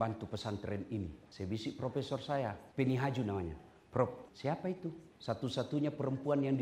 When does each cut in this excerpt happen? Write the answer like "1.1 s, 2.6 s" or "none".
1.2 s, 2.6 s, 4.7 s